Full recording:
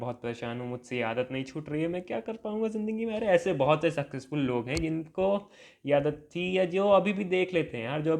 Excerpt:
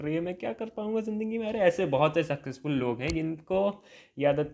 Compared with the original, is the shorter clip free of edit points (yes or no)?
yes